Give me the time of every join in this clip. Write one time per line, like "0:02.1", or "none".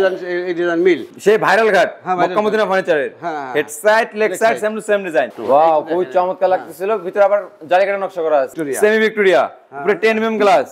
0:01.1
0:05.3
0:08.6